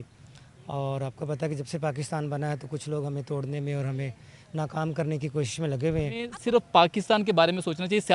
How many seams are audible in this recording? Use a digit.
1